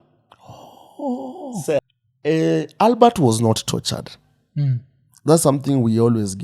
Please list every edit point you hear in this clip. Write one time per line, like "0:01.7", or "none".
0:01.8